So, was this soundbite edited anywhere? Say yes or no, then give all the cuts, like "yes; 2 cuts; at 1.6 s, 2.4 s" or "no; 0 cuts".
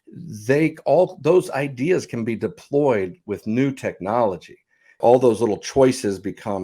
yes; 1 cut; at 5.0 s